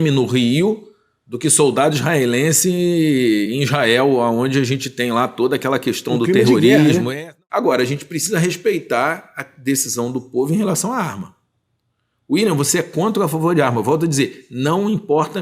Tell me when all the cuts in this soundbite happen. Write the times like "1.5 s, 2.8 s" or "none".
7.1 s

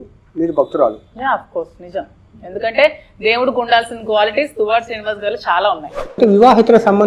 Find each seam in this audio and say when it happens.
6.2 s

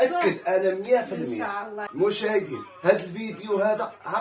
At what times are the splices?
1.8 s

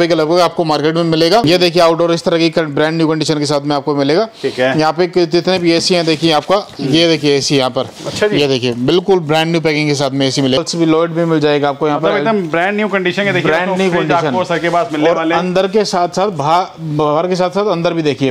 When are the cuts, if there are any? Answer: 1.4 s, 10.6 s

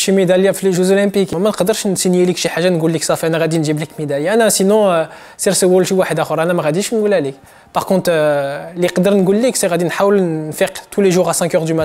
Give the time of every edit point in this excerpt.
1.3 s

